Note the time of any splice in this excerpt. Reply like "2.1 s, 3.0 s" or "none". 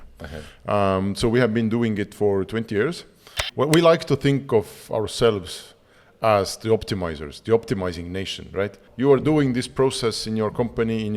3.4 s, 8.8 s